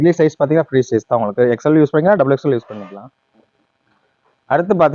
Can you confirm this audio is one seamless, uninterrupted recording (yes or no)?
no